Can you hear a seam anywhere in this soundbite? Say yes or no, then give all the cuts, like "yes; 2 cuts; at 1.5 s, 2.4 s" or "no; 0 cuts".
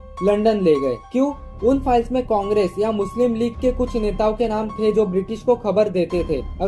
no; 0 cuts